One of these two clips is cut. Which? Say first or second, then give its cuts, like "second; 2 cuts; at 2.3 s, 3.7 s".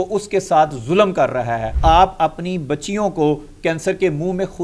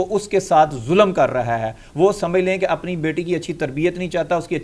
first; 1 cut; at 1.7 s